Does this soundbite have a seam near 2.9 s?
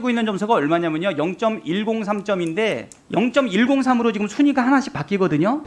yes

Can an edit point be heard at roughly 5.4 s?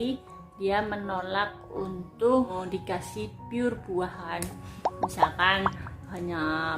no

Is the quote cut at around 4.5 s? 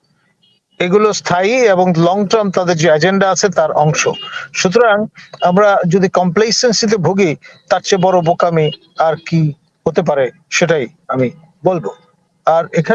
no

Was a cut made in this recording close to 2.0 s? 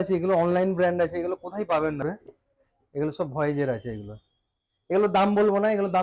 yes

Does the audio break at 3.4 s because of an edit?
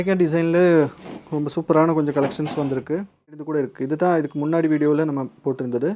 yes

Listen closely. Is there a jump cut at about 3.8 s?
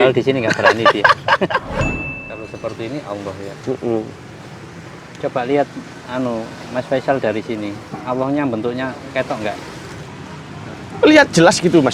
no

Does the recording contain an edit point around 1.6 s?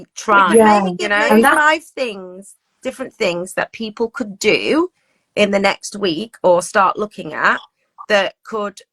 yes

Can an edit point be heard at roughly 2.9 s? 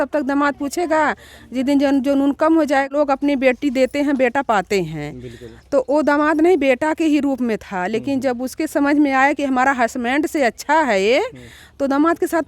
yes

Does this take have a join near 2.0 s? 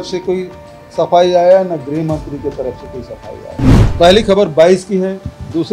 no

